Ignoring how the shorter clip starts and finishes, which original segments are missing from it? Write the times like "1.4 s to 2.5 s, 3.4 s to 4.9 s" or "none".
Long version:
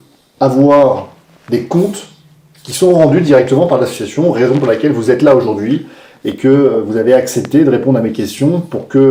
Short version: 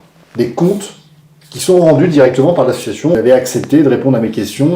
4.3 s to 7.0 s